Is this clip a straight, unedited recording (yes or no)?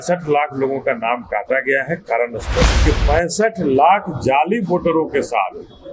no